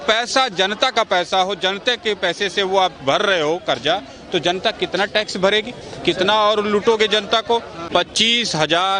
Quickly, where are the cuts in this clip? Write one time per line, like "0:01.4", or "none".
0:07.8